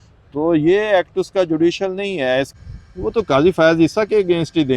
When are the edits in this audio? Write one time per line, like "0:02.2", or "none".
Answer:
0:02.5